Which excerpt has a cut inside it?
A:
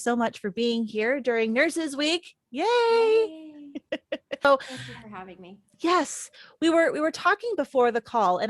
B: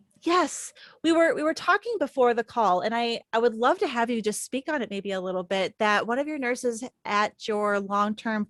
A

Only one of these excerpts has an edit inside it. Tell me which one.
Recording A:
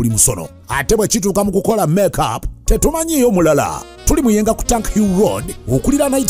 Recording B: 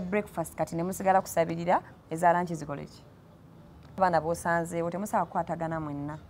B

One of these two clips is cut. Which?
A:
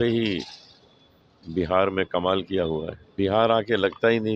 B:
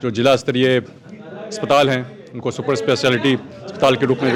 A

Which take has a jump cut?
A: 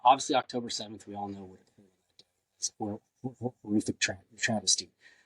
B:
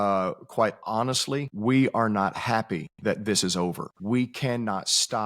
B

